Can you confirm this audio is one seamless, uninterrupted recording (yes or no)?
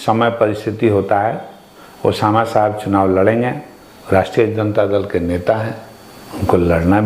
yes